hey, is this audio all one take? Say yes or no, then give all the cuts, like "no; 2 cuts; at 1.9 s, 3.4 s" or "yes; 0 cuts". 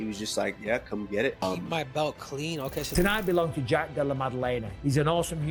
no; 1 cut; at 2.9 s